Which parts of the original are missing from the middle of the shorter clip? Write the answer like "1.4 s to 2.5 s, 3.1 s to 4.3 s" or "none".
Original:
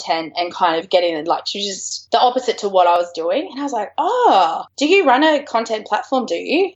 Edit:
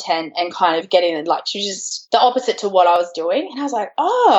none